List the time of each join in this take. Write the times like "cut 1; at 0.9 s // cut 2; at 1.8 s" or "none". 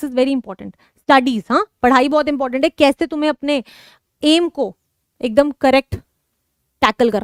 none